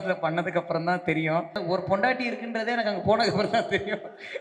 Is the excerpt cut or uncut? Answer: cut